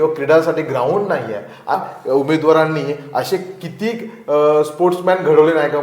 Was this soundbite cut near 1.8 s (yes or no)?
yes